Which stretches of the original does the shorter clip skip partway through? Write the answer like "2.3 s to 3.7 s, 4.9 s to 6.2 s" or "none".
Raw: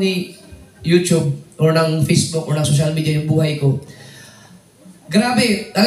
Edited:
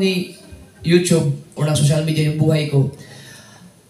1.5 s to 2.4 s